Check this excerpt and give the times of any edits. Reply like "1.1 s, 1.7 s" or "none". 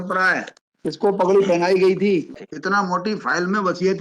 1.1 s, 2.3 s

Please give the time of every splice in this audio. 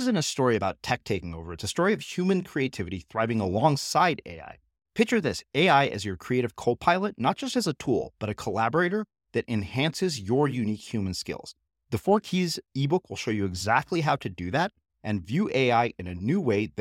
none

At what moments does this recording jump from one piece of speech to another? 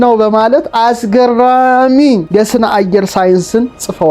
2.2 s

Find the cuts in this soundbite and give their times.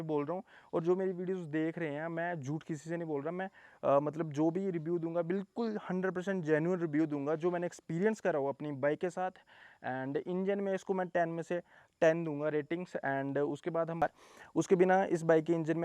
14.0 s

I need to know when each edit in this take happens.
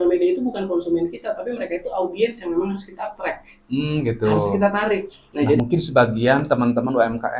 5.6 s

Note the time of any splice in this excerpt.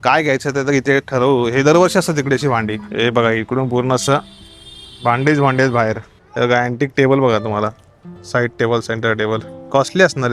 2.8 s, 6.2 s

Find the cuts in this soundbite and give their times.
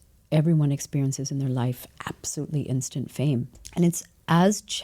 3.6 s

